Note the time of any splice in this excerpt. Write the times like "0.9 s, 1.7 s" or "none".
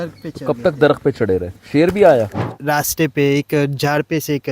2.5 s